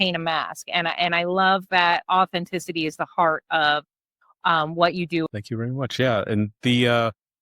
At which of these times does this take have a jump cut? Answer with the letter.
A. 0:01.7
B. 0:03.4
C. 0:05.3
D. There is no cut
C